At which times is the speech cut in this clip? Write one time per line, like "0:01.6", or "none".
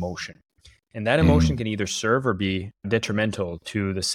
none